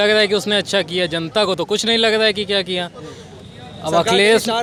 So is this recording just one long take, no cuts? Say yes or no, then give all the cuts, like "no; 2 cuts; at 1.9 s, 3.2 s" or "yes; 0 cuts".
yes; 0 cuts